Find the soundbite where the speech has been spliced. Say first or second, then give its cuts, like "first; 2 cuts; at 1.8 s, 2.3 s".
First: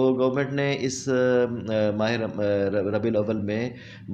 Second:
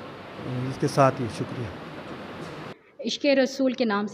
second; 1 cut; at 2.7 s